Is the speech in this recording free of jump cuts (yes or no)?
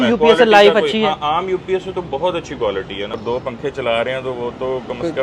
no